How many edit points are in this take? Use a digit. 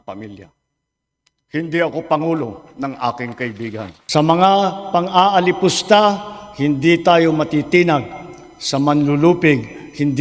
1